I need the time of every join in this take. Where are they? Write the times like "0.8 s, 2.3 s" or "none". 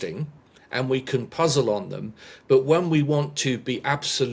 none